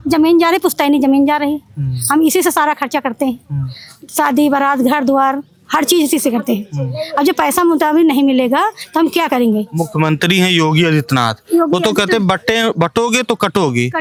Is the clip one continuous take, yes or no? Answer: yes